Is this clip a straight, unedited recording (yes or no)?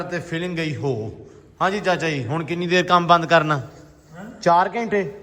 yes